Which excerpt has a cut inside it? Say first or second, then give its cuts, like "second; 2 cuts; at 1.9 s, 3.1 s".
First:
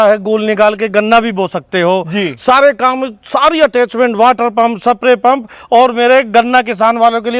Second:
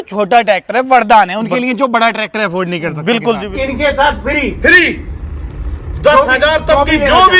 second; 1 cut; at 3.5 s